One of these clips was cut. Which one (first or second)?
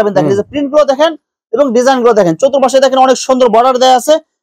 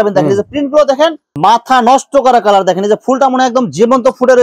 second